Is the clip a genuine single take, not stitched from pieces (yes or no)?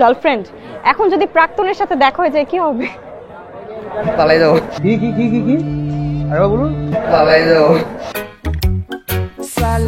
yes